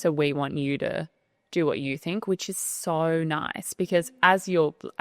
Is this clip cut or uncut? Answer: uncut